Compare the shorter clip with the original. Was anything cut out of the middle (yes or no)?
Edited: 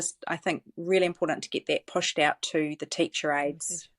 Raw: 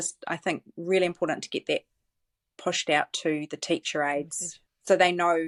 yes